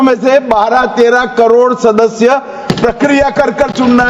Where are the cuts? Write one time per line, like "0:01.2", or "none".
none